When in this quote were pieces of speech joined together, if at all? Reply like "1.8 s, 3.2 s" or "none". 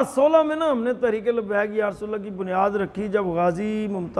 none